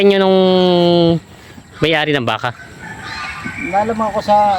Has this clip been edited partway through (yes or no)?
no